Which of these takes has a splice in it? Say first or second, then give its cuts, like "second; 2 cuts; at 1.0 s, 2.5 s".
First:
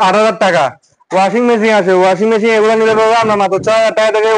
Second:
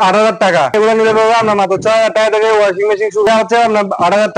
second; 2 cuts; at 0.7 s, 3.3 s